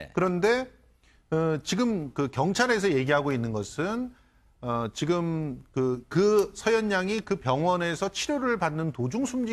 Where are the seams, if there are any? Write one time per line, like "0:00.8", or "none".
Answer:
0:05.0

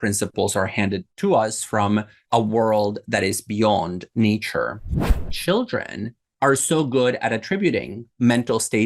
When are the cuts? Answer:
0:01.1
0:02.2
0:05.3

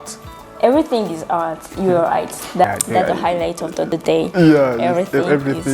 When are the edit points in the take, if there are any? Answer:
0:02.6
0:03.9

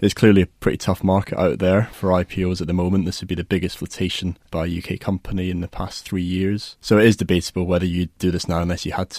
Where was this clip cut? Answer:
0:01.9
0:04.4
0:06.7
0:08.2

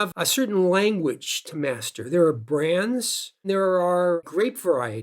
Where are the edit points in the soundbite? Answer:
0:03.4
0:04.2

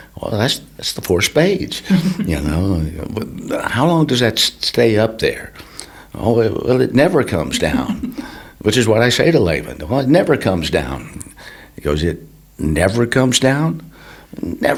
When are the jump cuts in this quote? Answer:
none

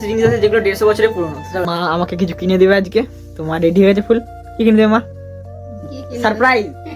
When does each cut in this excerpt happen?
0:01.7

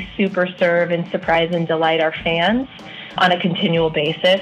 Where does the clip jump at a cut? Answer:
0:03.1

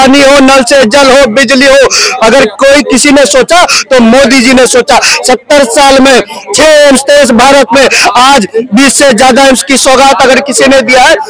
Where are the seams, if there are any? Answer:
none

